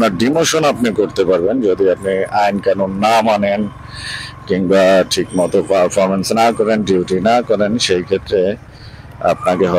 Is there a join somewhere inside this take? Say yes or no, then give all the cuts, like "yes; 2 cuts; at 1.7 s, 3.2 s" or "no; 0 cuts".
no; 0 cuts